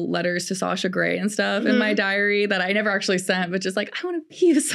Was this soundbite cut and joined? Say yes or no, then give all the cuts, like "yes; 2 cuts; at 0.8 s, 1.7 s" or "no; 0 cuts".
no; 0 cuts